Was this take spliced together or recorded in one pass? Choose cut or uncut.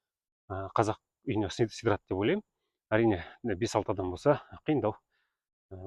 uncut